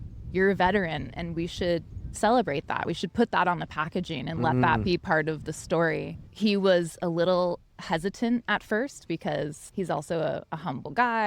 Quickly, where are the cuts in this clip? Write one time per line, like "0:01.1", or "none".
0:06.2
0:09.6